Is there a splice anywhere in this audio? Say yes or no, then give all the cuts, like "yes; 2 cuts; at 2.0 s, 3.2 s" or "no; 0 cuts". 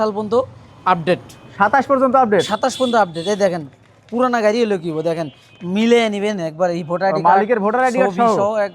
no; 0 cuts